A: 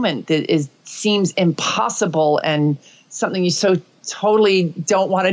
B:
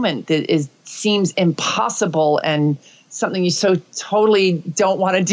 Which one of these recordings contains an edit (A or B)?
B